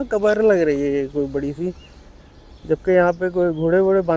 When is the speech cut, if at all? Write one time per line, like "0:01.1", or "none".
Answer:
none